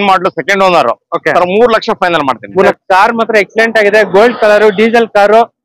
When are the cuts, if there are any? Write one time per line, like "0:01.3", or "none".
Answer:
0:02.7